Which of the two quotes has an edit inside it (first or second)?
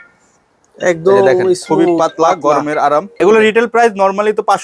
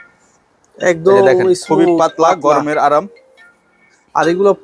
first